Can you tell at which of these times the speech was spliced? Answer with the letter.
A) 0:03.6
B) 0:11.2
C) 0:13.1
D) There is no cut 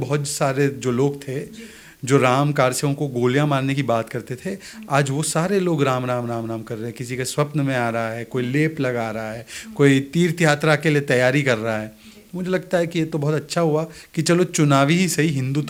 D